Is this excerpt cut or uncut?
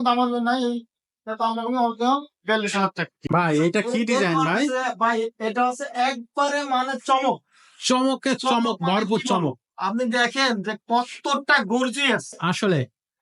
cut